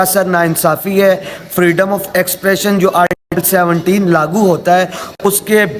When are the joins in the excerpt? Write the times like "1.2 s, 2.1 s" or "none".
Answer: none